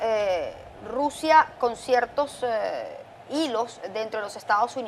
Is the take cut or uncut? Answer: uncut